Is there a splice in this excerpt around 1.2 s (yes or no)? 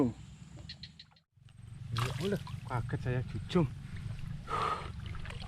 yes